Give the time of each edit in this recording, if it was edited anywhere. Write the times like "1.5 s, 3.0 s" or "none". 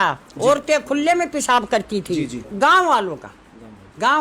2.4 s